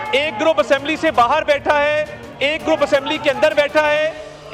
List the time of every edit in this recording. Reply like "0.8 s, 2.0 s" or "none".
none